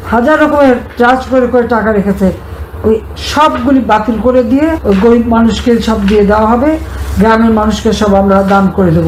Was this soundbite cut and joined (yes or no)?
yes